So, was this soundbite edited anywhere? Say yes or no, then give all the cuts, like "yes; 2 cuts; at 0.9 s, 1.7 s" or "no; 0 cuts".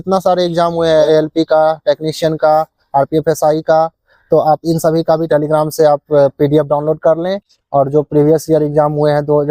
yes; 2 cuts; at 1.0 s, 5.2 s